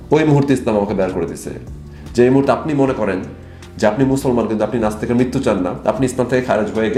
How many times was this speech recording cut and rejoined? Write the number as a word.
zero